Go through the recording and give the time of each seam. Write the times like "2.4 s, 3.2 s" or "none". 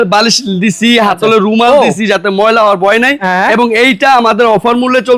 none